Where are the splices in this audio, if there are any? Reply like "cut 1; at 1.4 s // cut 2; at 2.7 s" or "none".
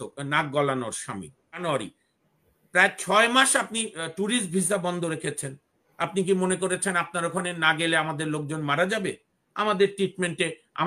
cut 1; at 1.6 s